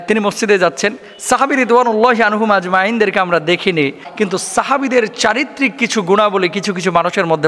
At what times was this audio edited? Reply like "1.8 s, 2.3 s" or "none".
4.0 s